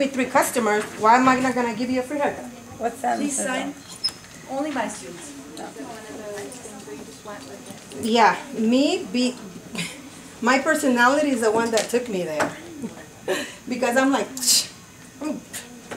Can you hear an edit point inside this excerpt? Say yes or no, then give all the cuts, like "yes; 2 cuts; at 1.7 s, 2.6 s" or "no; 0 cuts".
yes; 1 cut; at 5.7 s